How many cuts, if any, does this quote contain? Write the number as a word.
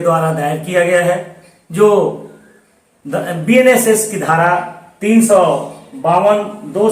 zero